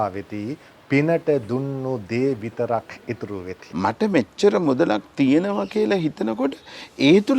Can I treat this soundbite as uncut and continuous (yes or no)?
no